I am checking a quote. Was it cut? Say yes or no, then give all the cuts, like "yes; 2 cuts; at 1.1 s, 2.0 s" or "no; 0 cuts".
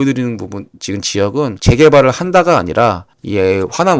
yes; 1 cut; at 1.6 s